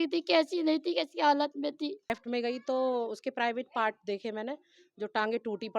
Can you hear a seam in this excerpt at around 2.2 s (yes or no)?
yes